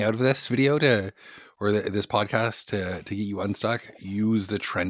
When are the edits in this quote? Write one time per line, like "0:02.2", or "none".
none